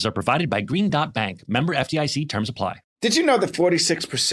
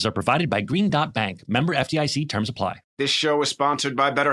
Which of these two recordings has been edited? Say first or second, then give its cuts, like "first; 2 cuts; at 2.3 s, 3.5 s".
first; 1 cut; at 2.8 s